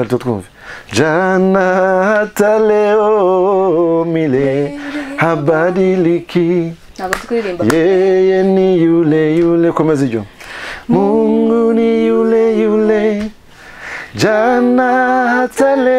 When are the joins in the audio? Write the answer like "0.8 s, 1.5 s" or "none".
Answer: none